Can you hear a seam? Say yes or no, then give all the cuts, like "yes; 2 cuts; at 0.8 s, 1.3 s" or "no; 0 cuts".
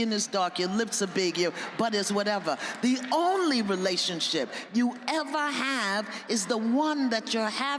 no; 0 cuts